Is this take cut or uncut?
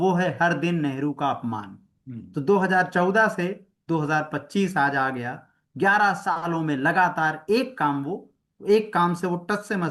uncut